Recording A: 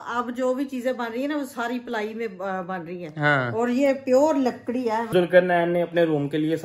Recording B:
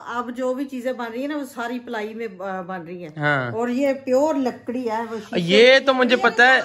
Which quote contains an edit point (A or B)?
A